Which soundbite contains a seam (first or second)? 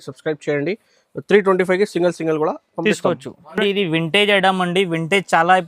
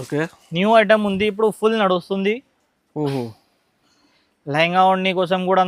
first